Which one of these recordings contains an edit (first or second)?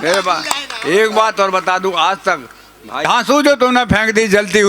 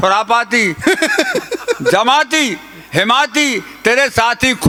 first